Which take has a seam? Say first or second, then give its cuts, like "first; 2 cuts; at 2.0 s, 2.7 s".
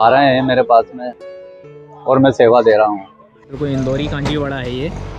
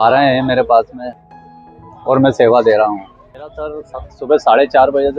first; 1 cut; at 3.5 s